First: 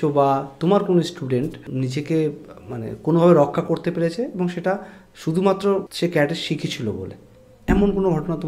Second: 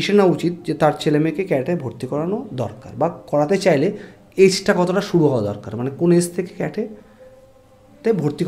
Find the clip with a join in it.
first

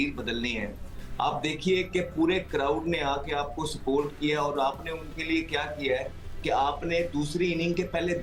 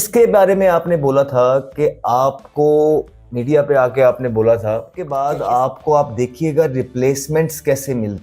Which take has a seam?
second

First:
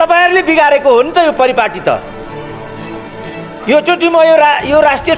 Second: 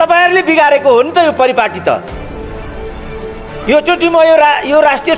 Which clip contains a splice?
second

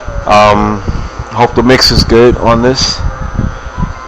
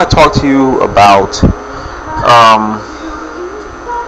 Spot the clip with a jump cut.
first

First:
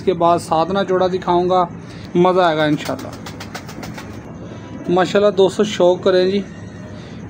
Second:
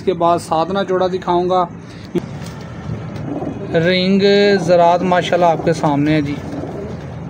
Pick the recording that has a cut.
second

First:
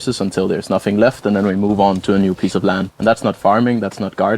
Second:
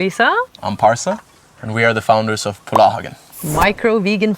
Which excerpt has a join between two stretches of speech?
first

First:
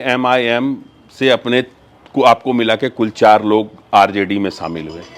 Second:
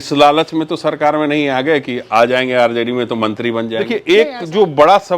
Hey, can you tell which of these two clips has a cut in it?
second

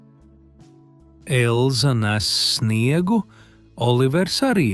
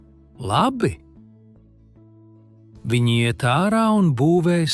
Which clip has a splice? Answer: second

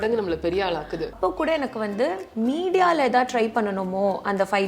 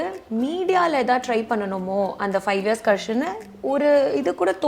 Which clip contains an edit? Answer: first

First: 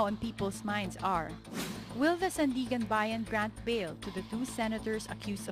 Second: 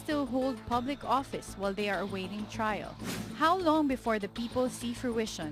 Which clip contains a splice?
first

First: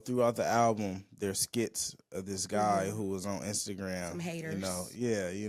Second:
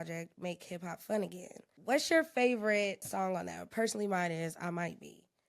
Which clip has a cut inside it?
second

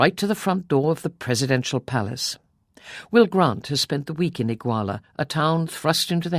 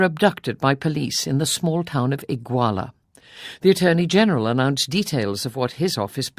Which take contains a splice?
second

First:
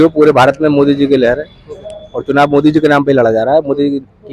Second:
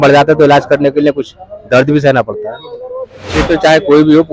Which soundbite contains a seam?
second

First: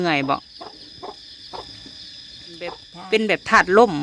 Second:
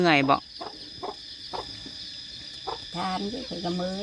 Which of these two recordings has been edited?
first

